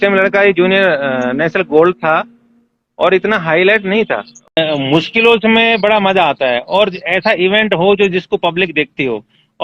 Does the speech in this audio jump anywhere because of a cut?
yes; 1 cut; at 4.6 s

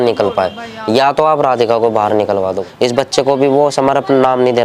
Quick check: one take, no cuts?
no; 1 cut; at 2.6 s

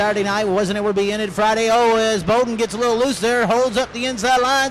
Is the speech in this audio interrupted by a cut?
no; 0 cuts

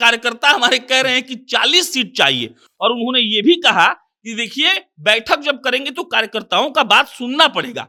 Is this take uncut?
yes; 0 cuts

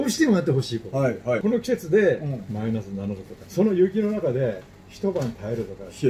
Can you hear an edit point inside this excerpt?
yes; 2 cuts; at 1.4 s, 3.5 s

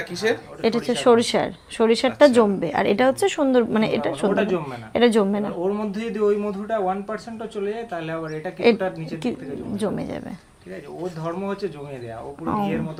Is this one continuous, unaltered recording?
yes; 0 cuts

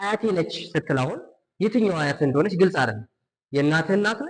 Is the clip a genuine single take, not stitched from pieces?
yes; 0 cuts

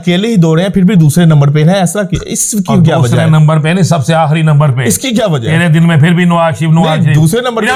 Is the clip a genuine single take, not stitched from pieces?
yes; 0 cuts

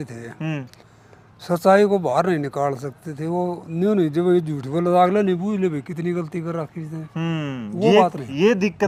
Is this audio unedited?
yes; 0 cuts

